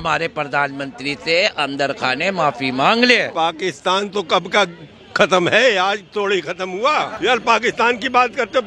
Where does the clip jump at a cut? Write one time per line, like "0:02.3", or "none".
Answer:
0:03.3
0:07.1